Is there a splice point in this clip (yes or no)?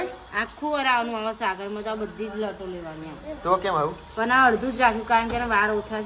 no